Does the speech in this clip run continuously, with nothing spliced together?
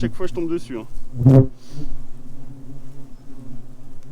yes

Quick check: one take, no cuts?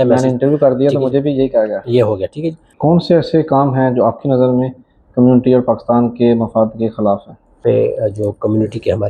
no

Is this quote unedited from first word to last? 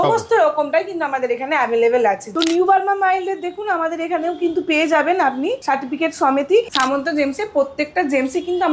no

